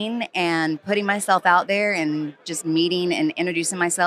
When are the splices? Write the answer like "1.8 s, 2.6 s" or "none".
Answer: none